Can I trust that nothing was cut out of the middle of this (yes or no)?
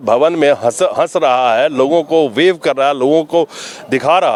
yes